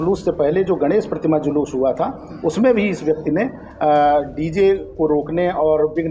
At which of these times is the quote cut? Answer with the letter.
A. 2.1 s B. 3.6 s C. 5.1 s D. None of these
D